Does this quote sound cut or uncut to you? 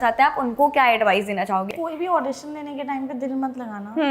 cut